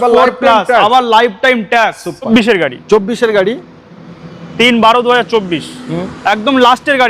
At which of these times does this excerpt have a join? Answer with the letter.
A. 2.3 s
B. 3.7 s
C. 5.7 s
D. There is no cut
A